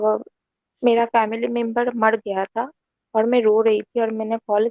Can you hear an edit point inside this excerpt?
no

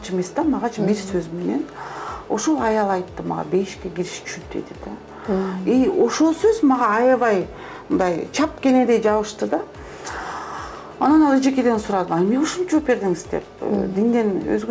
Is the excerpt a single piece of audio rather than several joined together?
yes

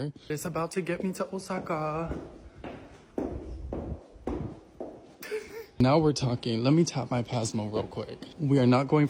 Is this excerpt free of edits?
yes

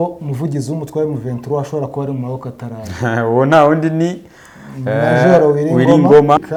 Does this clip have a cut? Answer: no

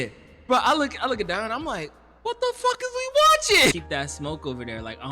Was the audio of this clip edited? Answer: yes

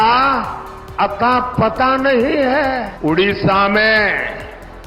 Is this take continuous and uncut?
no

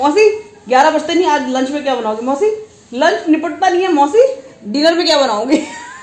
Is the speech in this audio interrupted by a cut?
no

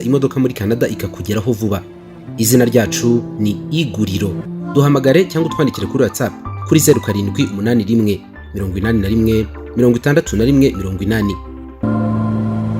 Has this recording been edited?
yes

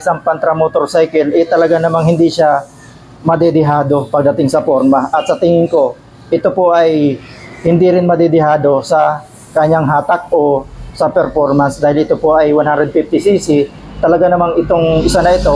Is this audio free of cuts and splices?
yes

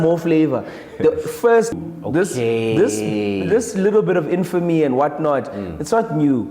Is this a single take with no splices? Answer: no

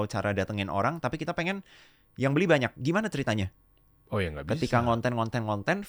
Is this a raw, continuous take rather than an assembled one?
yes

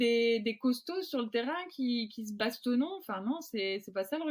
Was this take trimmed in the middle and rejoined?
no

